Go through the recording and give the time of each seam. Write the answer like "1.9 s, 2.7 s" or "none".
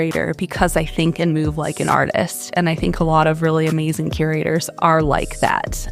4.7 s